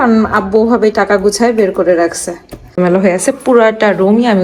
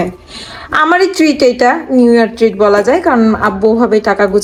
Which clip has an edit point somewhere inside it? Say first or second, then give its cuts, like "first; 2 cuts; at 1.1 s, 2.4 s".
first; 1 cut; at 2.7 s